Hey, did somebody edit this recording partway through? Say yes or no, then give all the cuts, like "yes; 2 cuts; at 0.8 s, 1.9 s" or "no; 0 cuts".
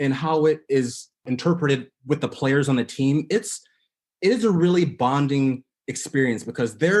yes; 1 cut; at 1.2 s